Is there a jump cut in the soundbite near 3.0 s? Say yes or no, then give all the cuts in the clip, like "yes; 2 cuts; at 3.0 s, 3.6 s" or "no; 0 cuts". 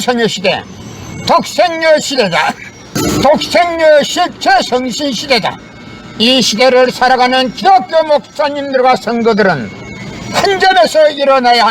yes; 1 cut; at 3.0 s